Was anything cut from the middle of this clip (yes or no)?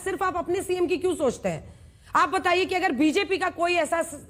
no